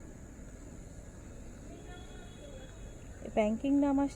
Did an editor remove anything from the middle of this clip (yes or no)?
no